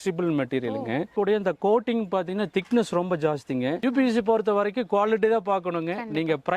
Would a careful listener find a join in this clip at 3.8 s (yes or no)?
yes